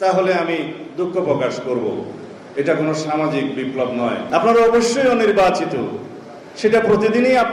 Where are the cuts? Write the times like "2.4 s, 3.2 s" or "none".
4.3 s